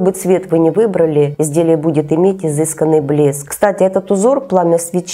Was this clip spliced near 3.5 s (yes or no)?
yes